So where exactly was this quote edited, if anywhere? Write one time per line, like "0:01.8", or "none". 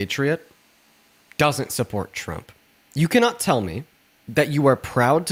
none

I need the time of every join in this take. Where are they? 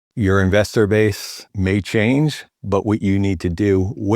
0:01.5

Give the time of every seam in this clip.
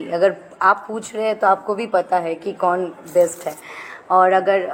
none

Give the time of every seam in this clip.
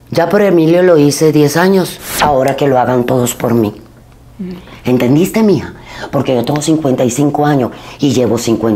0:02.0

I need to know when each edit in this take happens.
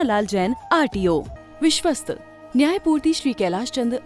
0:01.4

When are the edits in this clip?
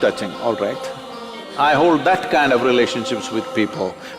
0:01.4

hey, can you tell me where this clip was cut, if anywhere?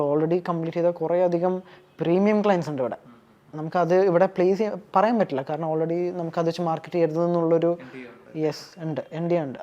none

